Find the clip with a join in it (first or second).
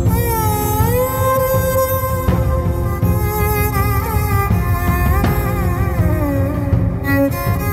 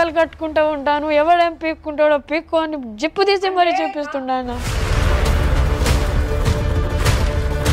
second